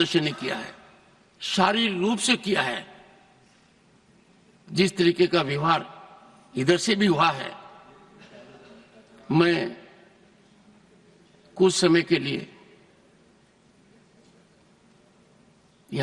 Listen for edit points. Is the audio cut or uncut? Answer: uncut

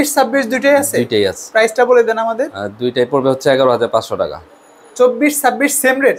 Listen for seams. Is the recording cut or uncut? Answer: uncut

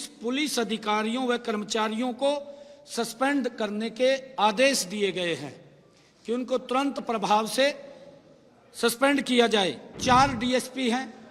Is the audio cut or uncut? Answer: cut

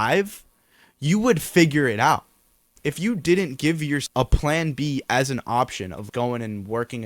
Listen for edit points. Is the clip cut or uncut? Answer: cut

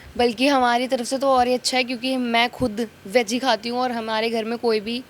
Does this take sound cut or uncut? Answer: uncut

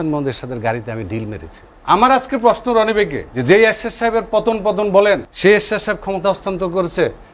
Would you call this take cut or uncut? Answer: cut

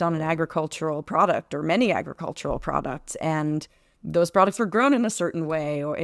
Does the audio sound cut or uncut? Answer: uncut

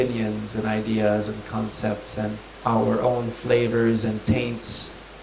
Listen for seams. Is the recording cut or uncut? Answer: cut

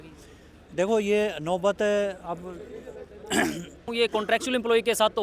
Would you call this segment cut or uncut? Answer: cut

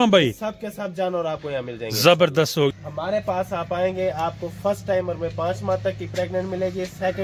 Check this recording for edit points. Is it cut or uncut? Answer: cut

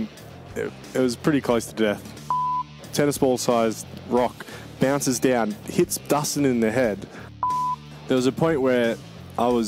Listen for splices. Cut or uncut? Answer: cut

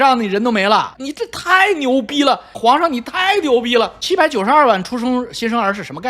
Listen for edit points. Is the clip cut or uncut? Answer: cut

